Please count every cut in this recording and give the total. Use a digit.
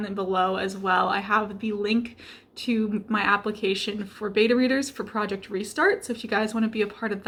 0